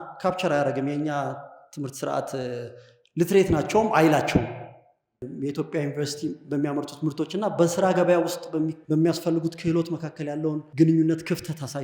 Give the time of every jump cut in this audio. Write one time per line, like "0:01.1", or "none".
0:05.3
0:08.8
0:10.6